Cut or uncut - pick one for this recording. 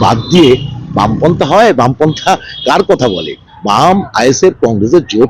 cut